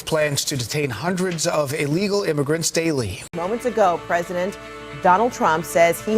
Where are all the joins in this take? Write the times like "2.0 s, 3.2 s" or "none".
3.2 s